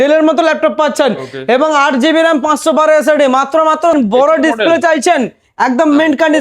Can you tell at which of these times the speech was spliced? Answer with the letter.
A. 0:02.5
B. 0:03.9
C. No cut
B